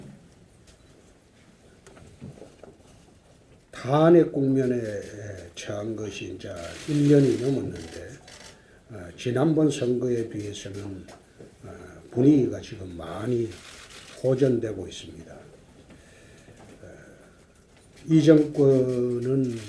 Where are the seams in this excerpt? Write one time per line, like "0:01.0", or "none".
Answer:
0:09.4